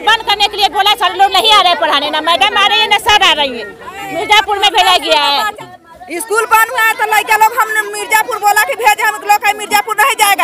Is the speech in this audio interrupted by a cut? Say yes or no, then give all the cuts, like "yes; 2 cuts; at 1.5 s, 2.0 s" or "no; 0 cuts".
yes; 1 cut; at 5.5 s